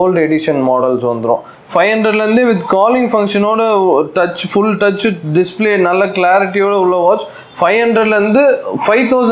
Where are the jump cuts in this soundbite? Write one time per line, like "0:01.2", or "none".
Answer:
0:01.6